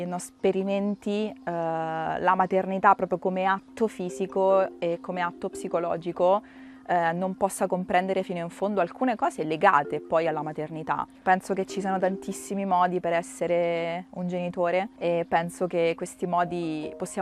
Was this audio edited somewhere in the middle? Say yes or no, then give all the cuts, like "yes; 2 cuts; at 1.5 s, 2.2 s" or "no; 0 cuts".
no; 0 cuts